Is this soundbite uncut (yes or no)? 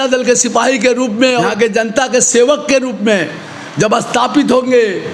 no